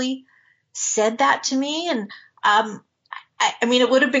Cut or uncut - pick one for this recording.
uncut